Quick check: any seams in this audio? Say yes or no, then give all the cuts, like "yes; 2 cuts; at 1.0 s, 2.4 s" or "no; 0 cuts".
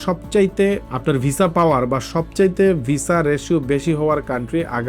no; 0 cuts